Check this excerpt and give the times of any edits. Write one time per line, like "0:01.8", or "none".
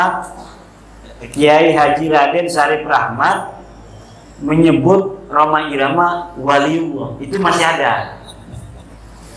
none